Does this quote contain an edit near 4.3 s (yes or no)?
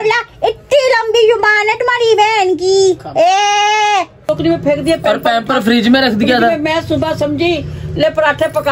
yes